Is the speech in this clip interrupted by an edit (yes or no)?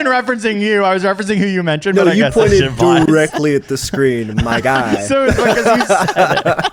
no